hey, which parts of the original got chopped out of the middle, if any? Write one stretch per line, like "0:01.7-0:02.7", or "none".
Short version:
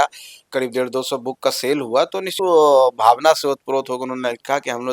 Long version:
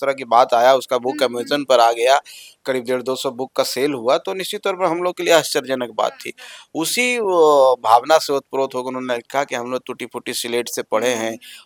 0:04.5-0:07.2